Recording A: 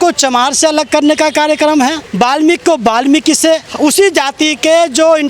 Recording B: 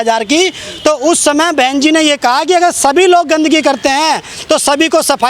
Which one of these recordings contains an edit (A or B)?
A